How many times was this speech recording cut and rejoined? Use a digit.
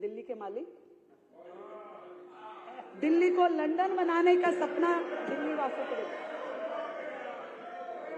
0